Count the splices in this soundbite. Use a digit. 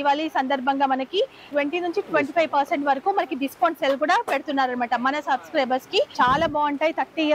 2